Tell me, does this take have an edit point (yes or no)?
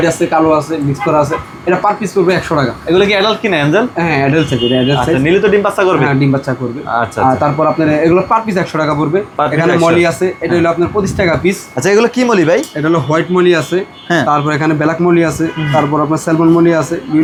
no